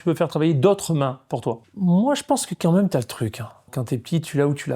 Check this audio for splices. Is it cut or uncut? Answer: cut